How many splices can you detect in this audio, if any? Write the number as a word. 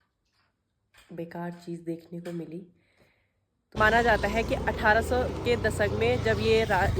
one